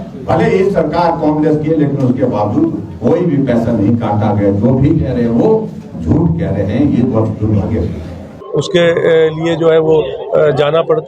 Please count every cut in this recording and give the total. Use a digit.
1